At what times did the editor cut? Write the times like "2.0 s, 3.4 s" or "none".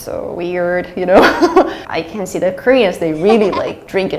1.8 s